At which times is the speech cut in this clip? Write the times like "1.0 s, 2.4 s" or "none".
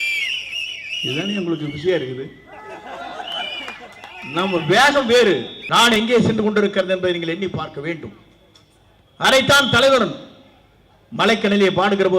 5.6 s